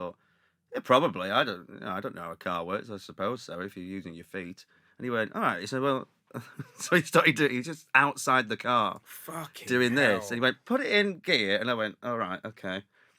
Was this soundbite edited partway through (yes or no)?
no